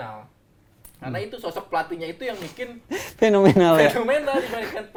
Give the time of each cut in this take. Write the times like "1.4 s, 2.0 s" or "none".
none